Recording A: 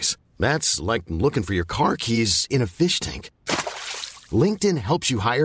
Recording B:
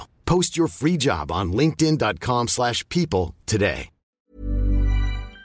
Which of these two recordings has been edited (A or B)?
B